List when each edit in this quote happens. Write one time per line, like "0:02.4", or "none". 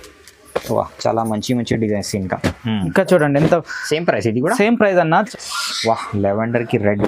0:05.3